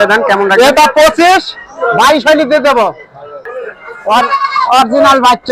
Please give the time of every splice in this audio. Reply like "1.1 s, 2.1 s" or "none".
3.4 s